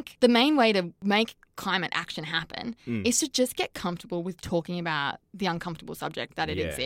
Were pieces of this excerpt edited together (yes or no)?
yes